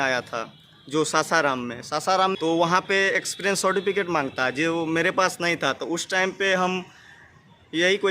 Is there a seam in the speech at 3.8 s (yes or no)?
no